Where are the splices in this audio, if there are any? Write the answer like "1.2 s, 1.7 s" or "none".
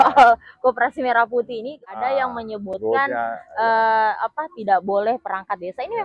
1.8 s

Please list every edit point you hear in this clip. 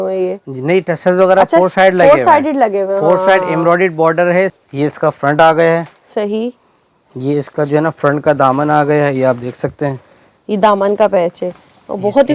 4.6 s

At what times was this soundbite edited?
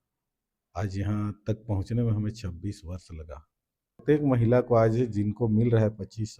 4.0 s

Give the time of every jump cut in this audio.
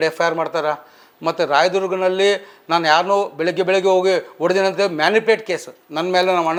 none

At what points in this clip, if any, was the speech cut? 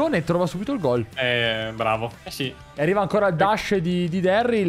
2.2 s

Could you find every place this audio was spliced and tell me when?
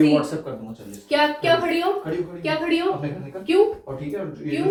none

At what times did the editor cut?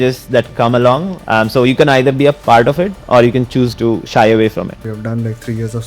1.1 s, 2.4 s, 4.8 s

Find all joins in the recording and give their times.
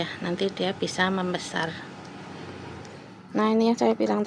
3.1 s

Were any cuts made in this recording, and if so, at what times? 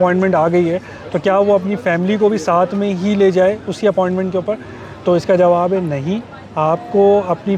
none

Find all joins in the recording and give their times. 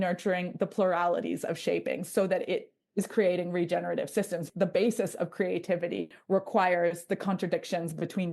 4.5 s, 6.1 s

